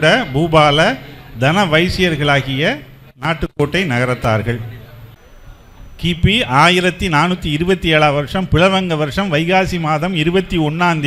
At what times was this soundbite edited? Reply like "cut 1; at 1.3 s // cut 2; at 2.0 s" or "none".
cut 1; at 5.2 s